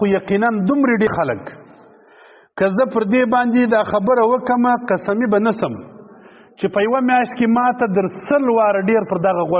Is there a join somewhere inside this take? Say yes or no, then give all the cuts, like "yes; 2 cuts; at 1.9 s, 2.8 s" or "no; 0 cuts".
yes; 1 cut; at 1.1 s